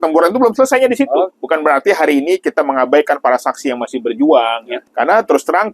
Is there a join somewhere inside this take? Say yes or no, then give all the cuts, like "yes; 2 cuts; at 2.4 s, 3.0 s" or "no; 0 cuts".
yes; 2 cuts; at 1.4 s, 4.8 s